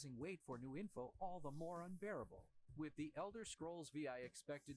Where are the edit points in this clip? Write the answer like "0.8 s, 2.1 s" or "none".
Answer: 0.9 s